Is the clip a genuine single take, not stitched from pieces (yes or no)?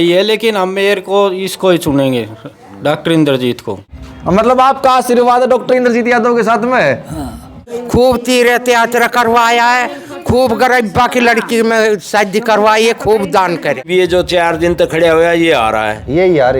no